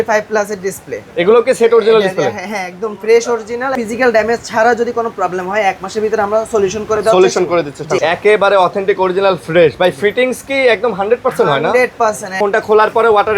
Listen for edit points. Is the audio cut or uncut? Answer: cut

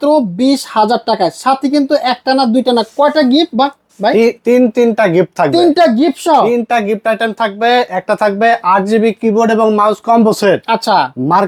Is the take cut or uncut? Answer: uncut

